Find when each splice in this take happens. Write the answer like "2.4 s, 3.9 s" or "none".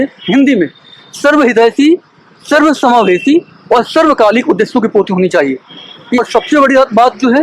6.2 s